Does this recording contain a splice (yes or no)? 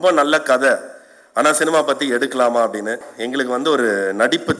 yes